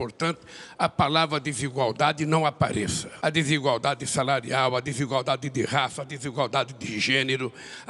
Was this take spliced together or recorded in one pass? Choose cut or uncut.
uncut